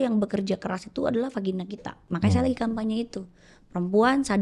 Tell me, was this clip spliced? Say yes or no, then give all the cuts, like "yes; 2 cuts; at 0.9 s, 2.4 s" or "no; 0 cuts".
yes; 1 cut; at 2.0 s